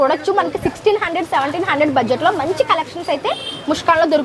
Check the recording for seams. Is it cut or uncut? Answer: uncut